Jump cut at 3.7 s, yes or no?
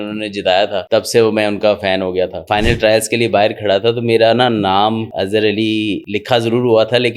no